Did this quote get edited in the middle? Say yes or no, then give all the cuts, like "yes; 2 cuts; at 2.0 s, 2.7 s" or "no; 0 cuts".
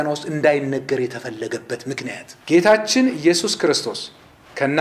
yes; 1 cut; at 2.3 s